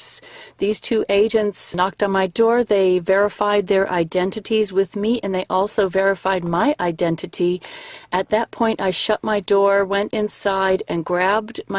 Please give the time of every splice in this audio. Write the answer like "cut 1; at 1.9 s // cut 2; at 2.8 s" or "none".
cut 1; at 5.5 s